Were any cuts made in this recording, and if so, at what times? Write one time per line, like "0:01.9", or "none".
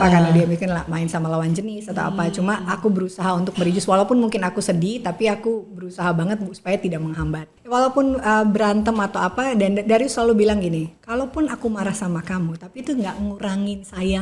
0:07.5